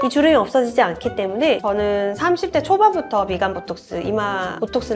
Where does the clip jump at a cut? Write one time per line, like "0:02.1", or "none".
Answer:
0:01.6